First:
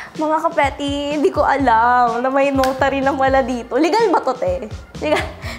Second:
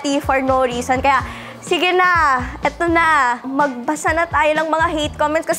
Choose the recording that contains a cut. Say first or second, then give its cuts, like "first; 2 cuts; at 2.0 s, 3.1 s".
second; 1 cut; at 3.5 s